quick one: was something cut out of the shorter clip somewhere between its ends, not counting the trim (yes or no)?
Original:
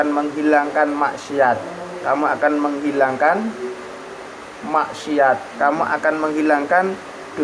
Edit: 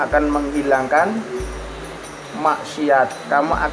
no